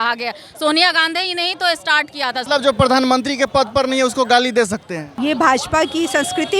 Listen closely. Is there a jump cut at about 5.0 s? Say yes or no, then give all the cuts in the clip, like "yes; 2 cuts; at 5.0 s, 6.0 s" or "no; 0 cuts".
yes; 2 cuts; at 2.4 s, 5.0 s